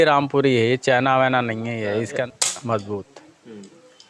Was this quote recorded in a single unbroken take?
no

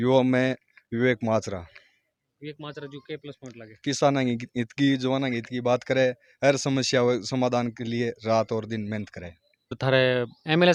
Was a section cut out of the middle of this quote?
no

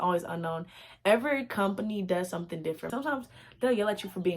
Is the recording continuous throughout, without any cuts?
no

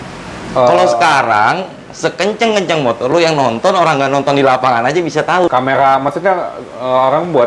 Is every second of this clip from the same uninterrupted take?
no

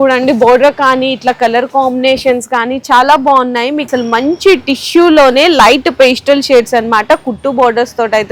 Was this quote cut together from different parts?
yes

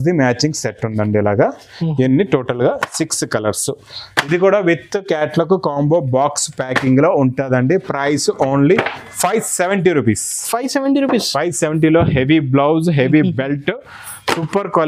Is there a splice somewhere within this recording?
no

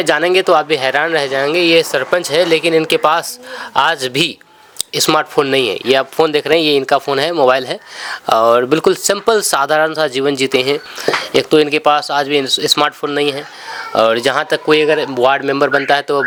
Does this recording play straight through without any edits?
yes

